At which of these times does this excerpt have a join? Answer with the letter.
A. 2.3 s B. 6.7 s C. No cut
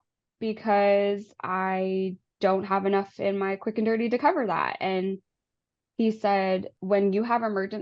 B